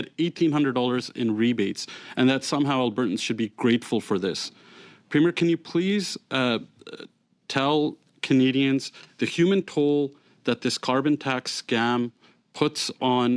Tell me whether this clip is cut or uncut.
uncut